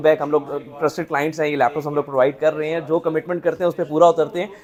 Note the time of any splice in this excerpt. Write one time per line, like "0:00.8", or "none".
none